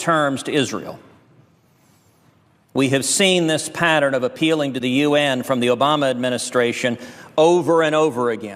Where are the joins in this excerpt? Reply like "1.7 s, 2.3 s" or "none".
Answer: 7.6 s